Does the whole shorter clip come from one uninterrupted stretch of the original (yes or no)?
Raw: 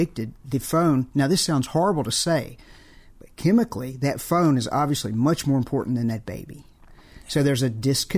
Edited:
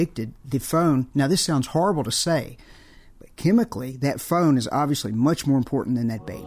yes